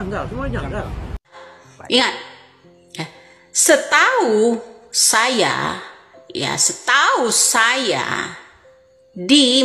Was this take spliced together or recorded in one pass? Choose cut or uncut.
cut